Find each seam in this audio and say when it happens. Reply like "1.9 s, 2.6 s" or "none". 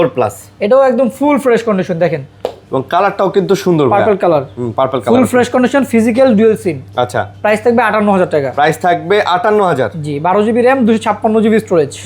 none